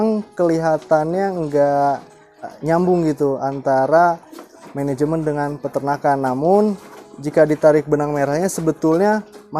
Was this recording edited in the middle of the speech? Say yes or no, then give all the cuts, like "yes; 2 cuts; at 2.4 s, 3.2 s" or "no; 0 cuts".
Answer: yes; 1 cut; at 2.5 s